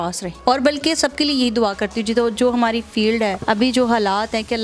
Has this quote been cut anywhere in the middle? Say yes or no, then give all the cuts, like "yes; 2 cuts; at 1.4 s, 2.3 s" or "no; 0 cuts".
yes; 1 cut; at 3.4 s